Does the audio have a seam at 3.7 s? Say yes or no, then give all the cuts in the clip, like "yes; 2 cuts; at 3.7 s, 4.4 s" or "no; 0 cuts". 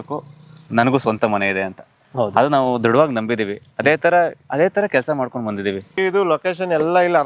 no; 1 cut; at 6.0 s